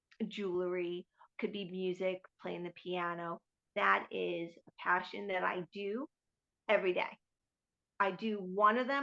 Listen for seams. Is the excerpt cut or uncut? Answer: uncut